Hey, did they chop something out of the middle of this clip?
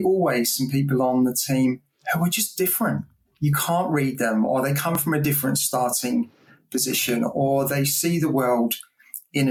no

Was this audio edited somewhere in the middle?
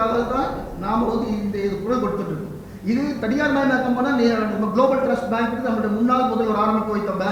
no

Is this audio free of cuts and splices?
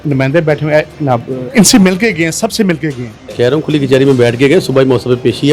no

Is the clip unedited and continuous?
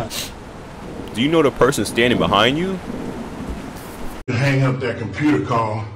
yes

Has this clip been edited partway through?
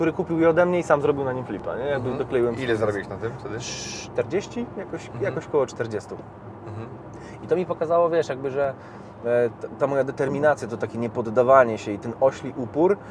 no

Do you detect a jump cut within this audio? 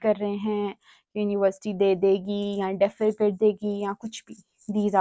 no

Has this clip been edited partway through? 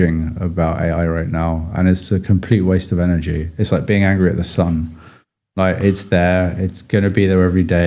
no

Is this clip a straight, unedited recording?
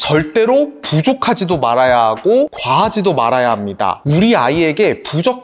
no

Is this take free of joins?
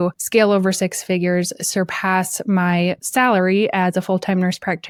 yes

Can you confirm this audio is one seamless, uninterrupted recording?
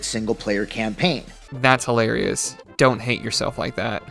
yes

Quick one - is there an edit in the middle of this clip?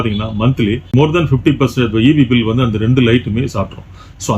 yes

